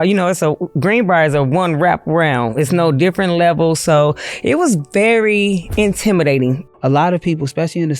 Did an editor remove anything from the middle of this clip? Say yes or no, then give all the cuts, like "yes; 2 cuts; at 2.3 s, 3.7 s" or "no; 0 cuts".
yes; 1 cut; at 6.6 s